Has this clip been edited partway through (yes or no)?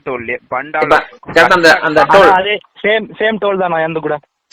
no